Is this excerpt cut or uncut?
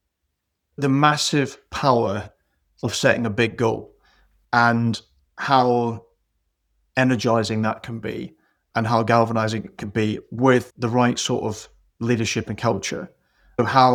uncut